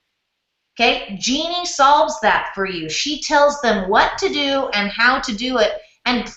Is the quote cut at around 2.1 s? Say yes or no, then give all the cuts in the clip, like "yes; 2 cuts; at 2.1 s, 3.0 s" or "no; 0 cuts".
no; 0 cuts